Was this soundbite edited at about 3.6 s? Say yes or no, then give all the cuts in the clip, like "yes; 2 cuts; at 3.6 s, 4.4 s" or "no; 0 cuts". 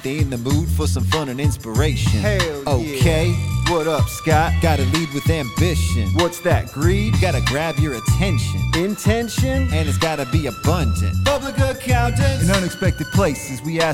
no; 0 cuts